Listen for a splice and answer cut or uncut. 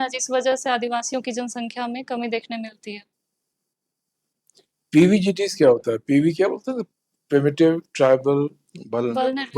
uncut